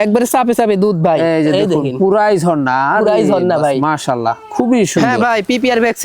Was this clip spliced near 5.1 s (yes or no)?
yes